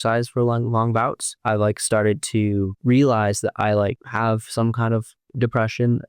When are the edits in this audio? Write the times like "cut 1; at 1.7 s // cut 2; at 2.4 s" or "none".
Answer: cut 1; at 1.3 s // cut 2; at 2.7 s // cut 3; at 4.0 s // cut 4; at 5.2 s